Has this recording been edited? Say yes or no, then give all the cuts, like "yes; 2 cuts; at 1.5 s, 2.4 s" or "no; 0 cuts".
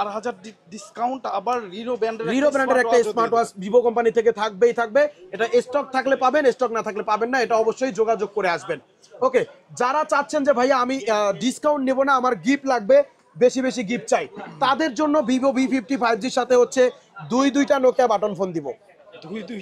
no; 0 cuts